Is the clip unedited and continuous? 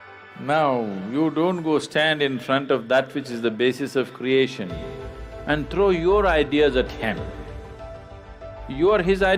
yes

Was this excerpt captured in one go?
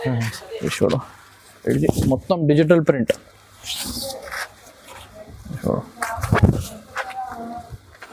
yes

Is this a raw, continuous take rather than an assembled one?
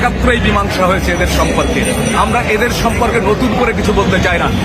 yes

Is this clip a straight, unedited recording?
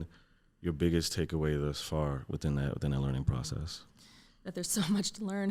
yes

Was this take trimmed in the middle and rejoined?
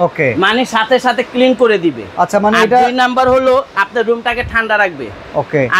no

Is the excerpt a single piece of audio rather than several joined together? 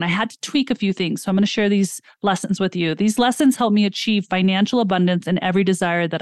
yes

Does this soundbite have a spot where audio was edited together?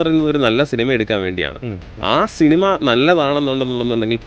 no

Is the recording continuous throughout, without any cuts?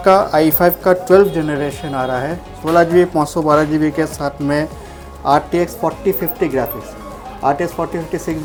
yes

